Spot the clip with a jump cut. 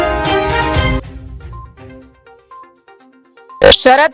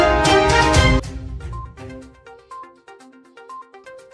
first; 1 cut; at 3.2 s

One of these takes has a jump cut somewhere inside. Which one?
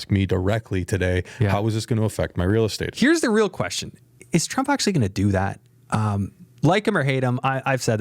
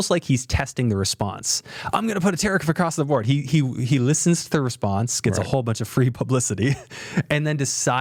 first; 1 cut; at 2.9 s

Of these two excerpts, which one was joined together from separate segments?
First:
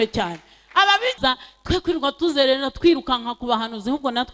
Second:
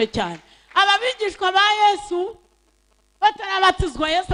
first; 1 cut; at 1.2 s

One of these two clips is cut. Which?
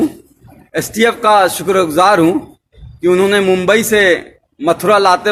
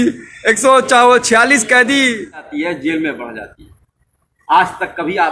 second; 1 cut; at 2.5 s

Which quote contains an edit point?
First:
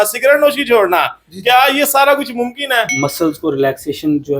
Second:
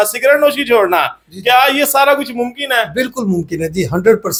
first; 1 cut; at 2.9 s

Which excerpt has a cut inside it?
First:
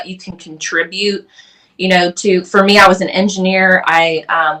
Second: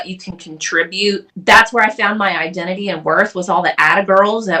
second; 1 cut; at 1.3 s

